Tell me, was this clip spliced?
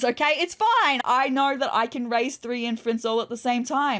yes; 1 cut; at 1.0 s

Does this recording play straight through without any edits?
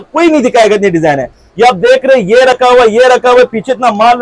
yes; 0 cuts

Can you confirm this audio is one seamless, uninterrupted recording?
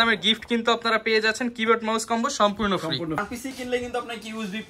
no; 1 cut; at 3.3 s

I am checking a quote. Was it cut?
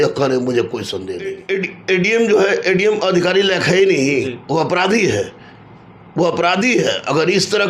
yes; 1 cut; at 1.4 s

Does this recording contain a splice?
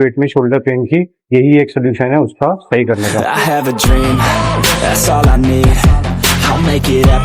yes; 2 cuts; at 1.2 s, 3.2 s

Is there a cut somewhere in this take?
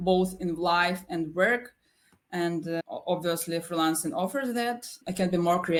no; 0 cuts

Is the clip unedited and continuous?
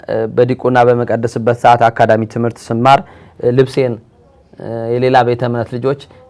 yes; 0 cuts

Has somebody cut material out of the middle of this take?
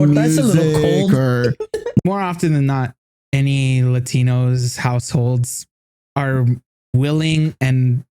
yes; 2 cuts; at 2.0 s, 3.1 s

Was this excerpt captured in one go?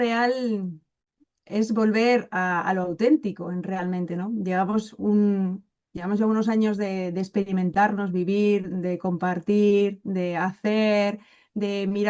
yes; 0 cuts

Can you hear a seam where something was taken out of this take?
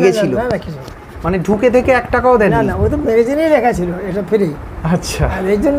no; 0 cuts

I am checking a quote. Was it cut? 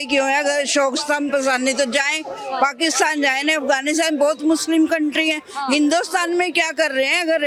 no; 0 cuts

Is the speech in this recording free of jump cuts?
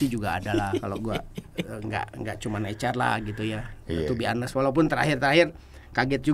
yes; 0 cuts

